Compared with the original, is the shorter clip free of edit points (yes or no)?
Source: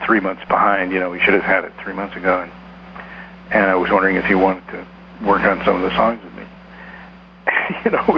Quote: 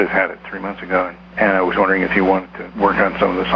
no